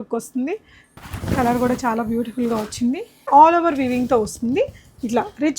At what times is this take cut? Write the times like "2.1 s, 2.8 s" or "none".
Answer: 0.9 s, 3.3 s